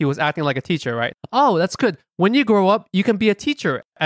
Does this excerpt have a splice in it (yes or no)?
yes